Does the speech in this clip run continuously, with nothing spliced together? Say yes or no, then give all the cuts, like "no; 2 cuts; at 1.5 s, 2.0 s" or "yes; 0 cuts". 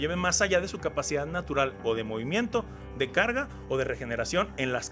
yes; 0 cuts